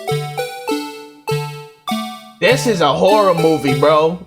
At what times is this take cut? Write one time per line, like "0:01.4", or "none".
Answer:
0:00.9